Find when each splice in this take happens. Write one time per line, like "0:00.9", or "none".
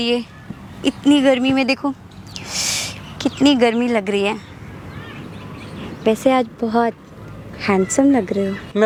none

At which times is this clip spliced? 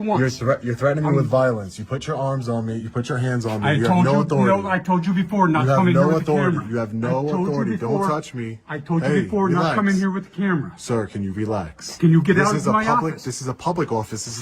none

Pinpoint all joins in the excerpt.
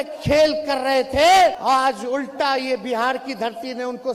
0:01.6

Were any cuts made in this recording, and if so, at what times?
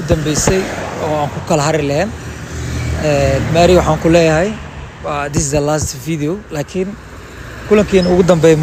none

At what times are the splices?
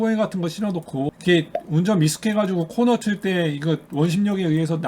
0:01.1

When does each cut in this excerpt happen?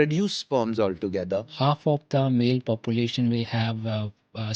0:01.4

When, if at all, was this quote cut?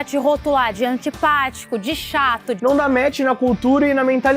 0:02.5

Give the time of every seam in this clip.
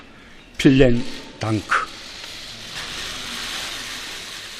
0:01.9

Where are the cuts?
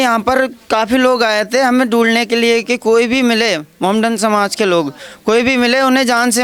none

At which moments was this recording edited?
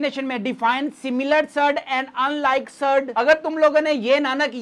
0:03.1

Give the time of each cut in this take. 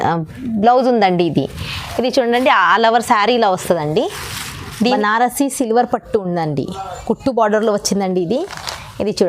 0:04.9

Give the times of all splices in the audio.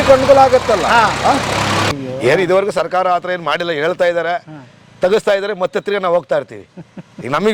0:01.9

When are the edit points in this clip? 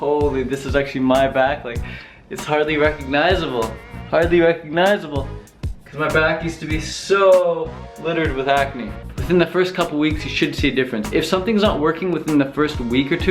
0:09.1

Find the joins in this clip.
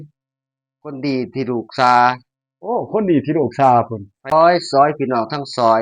0:04.3

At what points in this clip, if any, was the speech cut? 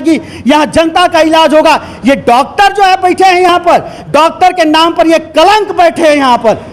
none

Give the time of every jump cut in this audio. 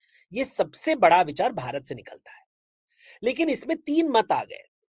none

